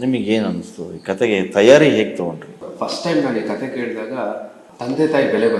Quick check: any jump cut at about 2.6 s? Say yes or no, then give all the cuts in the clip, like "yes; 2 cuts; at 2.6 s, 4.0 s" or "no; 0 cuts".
yes; 2 cuts; at 2.6 s, 4.6 s